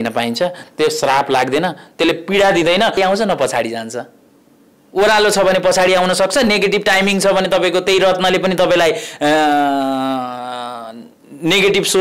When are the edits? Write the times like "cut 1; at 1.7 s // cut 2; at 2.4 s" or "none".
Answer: cut 1; at 3.0 s